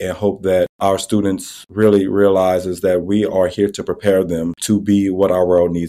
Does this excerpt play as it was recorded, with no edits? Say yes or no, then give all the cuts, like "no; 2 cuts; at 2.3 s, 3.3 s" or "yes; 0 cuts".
yes; 0 cuts